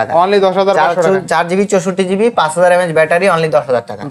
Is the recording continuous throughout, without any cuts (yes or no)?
yes